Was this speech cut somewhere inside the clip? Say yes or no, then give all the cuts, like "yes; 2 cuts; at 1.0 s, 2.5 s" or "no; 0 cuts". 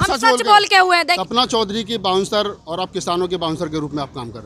yes; 1 cut; at 1.2 s